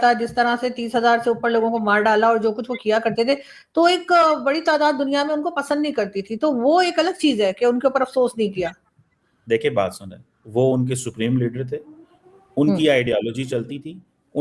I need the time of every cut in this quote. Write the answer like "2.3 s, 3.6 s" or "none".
none